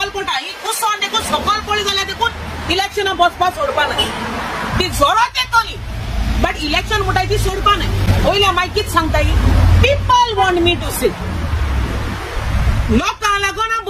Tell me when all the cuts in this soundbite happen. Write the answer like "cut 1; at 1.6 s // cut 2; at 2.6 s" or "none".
none